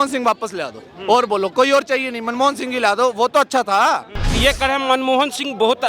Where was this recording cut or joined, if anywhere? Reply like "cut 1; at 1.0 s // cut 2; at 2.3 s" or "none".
cut 1; at 4.3 s